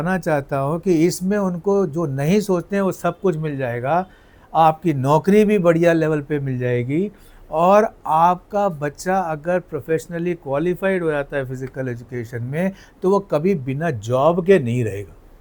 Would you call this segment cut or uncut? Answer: uncut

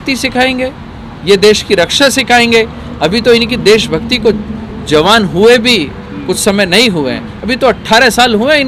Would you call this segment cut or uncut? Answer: uncut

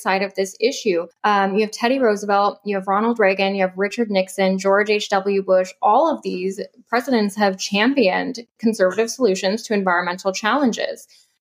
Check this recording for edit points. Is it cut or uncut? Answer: cut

